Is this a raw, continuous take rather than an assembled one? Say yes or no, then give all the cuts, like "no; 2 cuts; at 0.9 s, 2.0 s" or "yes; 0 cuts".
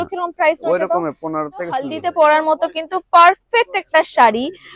no; 1 cut; at 2.0 s